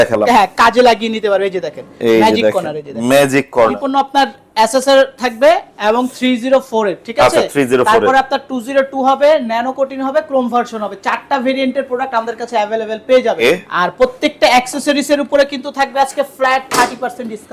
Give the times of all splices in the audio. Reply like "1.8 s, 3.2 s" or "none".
3.8 s, 13.4 s